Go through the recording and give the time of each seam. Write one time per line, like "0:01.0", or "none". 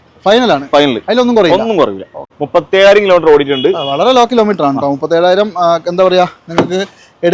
0:02.4

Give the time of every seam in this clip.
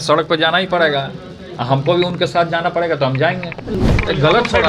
0:03.7

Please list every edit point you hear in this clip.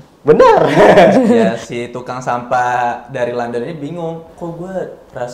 0:01.6
0:04.3

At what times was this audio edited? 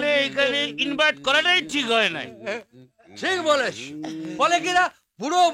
none

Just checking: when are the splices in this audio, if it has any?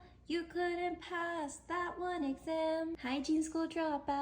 0:03.0

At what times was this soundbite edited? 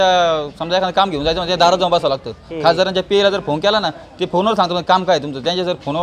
none

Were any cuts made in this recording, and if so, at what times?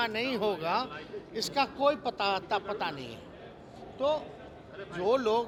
none

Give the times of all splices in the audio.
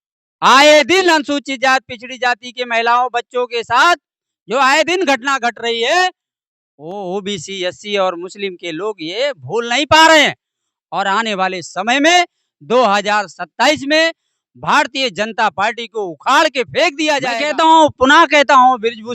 0:17.4

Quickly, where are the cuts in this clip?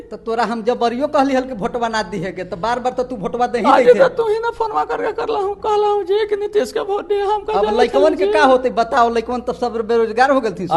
none

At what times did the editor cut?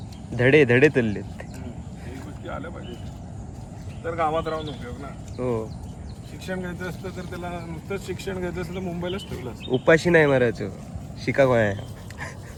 none

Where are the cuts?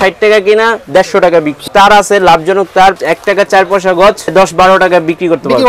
0:01.6
0:03.0
0:04.3

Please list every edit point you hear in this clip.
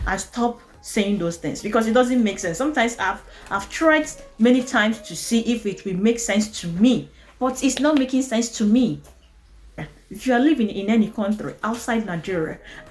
none

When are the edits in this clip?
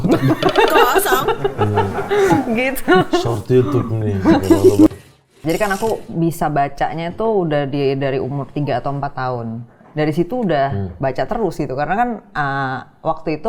0:04.9

